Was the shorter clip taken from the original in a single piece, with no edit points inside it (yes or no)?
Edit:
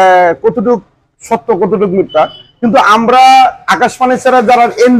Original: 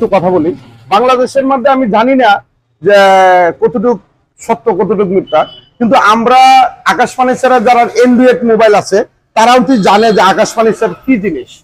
yes